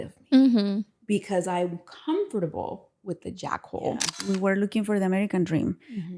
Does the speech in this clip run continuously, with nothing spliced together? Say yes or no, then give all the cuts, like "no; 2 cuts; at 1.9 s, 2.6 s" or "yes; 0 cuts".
no; 1 cut; at 4.1 s